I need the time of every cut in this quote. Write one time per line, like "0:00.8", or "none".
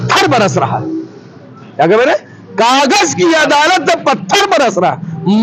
none